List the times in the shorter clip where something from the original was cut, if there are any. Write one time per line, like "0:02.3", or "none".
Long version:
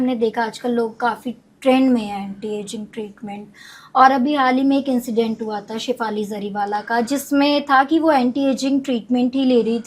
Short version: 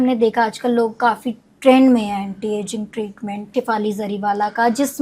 0:03.4